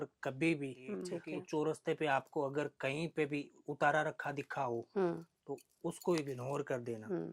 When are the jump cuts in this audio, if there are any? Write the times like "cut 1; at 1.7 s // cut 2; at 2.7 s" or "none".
cut 1; at 1.1 s